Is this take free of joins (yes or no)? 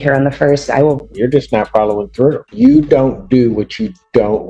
no